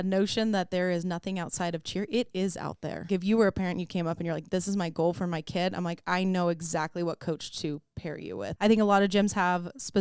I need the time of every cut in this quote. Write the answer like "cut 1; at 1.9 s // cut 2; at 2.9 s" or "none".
cut 1; at 3.0 s // cut 2; at 8.5 s

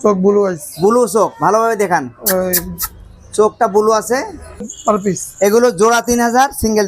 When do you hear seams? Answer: cut 1; at 4.6 s

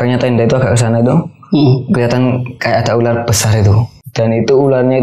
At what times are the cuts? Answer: cut 1; at 4.0 s

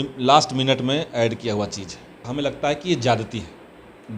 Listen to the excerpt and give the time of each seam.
cut 1; at 2.2 s

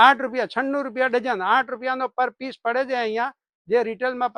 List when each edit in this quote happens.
none

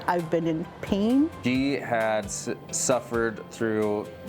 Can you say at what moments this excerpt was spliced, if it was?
cut 1; at 1.4 s

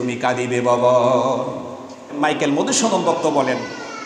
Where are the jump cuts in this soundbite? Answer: cut 1; at 2.2 s

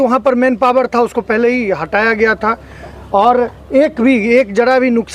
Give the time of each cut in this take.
none

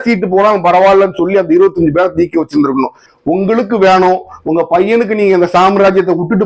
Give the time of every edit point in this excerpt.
cut 1; at 3.0 s

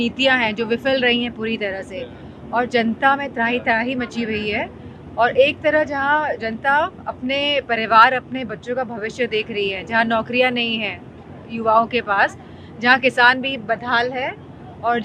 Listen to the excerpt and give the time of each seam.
none

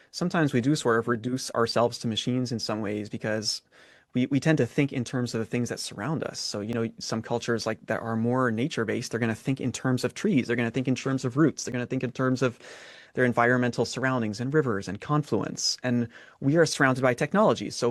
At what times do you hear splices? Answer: none

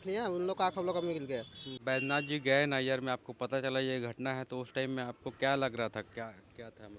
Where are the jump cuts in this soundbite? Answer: cut 1; at 1.8 s

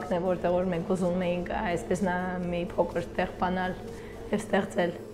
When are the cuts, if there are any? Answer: none

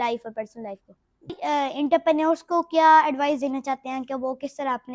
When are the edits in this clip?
cut 1; at 1.3 s

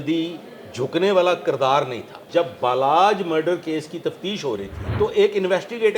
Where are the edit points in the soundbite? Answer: cut 1; at 2.2 s // cut 2; at 4.8 s

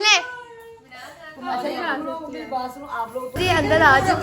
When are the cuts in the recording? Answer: cut 1; at 3.2 s

